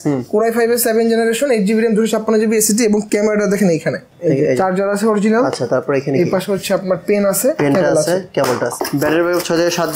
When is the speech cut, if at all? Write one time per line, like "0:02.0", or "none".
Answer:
0:04.1
0:08.7